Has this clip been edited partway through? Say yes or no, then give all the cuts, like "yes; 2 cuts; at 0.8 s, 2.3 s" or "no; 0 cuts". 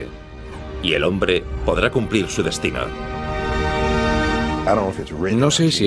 yes; 1 cut; at 4.6 s